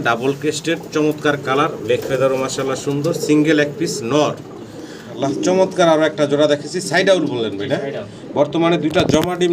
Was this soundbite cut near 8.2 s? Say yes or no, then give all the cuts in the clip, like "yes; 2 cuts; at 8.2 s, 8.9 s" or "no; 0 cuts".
no; 1 cut; at 5.1 s